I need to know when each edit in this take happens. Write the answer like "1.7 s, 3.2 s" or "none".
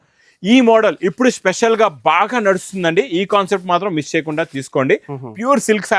none